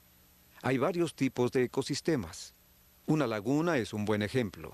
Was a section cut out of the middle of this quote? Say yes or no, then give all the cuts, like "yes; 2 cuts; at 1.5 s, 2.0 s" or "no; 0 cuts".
yes; 1 cut; at 1.3 s